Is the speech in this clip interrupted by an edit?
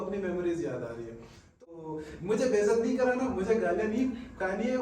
yes; 1 cut; at 1.7 s

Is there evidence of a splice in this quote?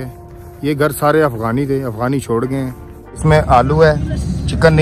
yes; 1 cut; at 3.2 s

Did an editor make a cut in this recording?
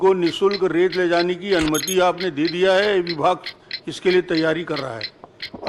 no; 0 cuts

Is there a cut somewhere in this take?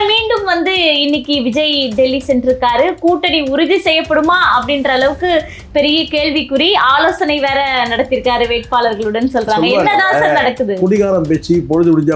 no; 0 cuts

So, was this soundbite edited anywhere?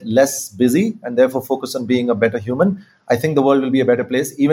no; 0 cuts

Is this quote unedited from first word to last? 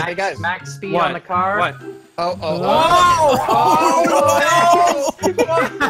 yes; 0 cuts

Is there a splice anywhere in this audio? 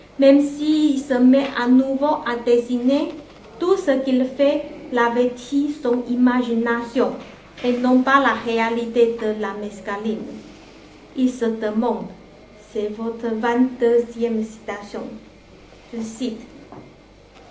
yes; 1 cut; at 8.9 s

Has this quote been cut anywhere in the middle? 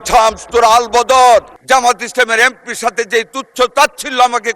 yes; 1 cut; at 1.5 s

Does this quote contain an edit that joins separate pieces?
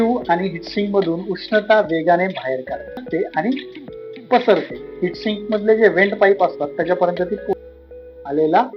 yes; 2 cuts; at 3.1 s, 7.5 s

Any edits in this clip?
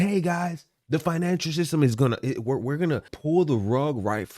yes; 1 cut; at 3.1 s

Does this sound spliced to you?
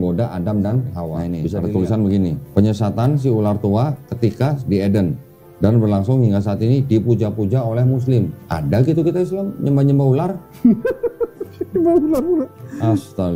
yes; 1 cut; at 1.6 s

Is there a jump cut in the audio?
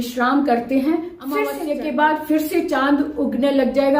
yes; 1 cut; at 1.5 s

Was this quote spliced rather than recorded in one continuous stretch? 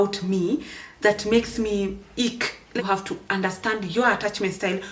yes; 1 cut; at 2.8 s

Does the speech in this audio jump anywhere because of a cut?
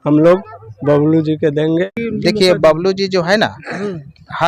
yes; 1 cut; at 1.9 s

